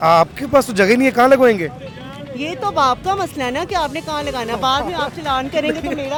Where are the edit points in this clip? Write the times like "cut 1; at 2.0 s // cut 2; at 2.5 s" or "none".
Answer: none